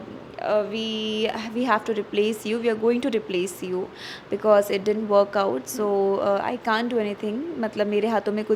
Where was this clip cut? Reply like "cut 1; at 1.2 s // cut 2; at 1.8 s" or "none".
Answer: none

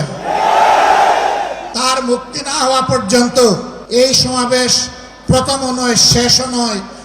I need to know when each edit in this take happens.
cut 1; at 1.7 s // cut 2; at 3.7 s

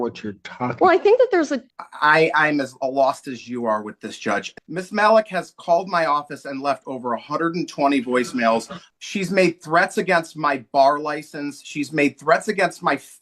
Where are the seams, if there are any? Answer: cut 1; at 1.6 s // cut 2; at 4.5 s // cut 3; at 8.8 s

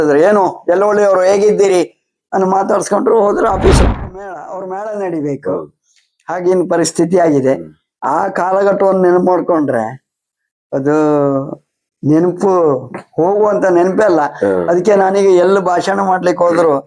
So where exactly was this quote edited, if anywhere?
cut 1; at 3.8 s

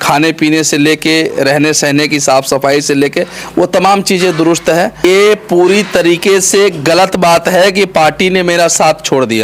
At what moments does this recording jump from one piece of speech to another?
cut 1; at 5.0 s

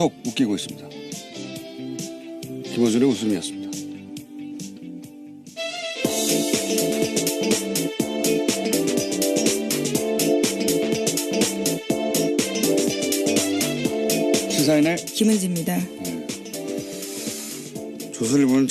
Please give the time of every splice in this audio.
none

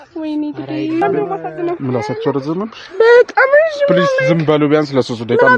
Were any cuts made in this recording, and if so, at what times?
cut 1; at 1.0 s

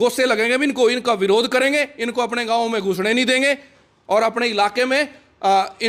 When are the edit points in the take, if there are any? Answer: none

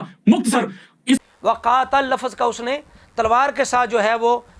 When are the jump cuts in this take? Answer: cut 1; at 1.3 s

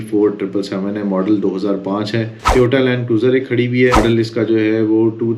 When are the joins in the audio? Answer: cut 1; at 2.4 s // cut 2; at 4.0 s

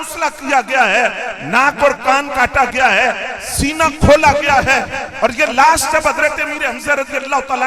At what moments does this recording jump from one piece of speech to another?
none

